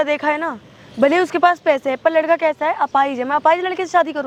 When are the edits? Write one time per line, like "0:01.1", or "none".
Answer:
none